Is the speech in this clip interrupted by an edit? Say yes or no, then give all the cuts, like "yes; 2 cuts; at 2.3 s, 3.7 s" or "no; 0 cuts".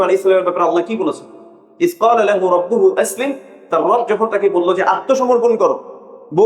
yes; 1 cut; at 1.6 s